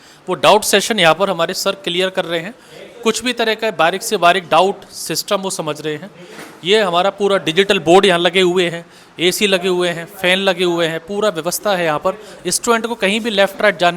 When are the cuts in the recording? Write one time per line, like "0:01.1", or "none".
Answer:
none